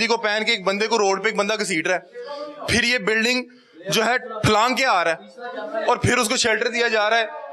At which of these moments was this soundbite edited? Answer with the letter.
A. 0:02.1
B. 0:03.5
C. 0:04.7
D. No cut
D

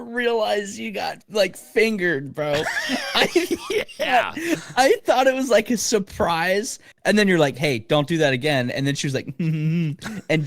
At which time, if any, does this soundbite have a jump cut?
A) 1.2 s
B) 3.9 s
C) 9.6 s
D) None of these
A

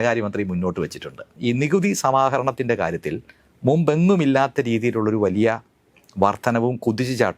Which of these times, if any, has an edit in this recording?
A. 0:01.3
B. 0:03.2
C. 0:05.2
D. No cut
A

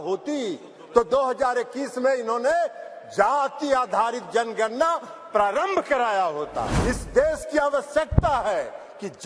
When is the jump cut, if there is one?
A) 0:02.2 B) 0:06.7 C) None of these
B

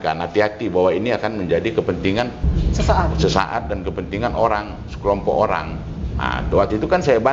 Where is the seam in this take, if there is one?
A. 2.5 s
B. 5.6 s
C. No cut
A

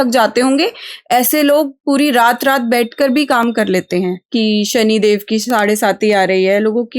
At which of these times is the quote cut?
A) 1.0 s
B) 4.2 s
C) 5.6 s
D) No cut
B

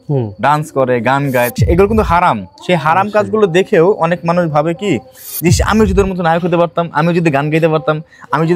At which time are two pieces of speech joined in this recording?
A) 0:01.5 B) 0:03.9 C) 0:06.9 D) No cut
A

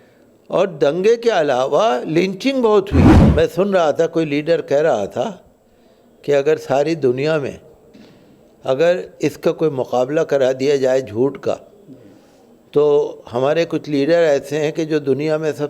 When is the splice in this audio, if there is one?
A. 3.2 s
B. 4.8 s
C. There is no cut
A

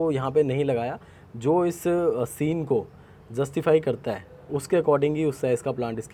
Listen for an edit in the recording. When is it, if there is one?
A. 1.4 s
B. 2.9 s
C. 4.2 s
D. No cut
D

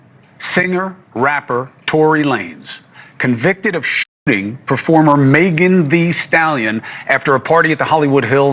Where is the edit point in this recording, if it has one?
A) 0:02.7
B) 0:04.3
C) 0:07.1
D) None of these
D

